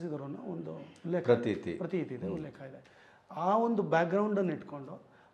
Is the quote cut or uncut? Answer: uncut